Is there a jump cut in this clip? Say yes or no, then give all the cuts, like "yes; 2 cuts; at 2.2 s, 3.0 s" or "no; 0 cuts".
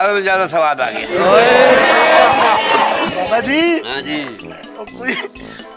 yes; 1 cut; at 3.1 s